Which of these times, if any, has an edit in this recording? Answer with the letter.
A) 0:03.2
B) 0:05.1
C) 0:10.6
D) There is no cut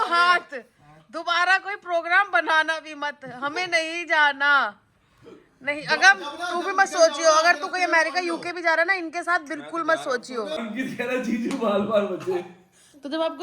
C